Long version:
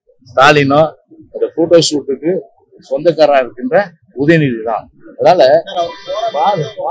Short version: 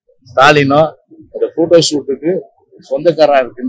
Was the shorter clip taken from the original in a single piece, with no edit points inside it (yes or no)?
yes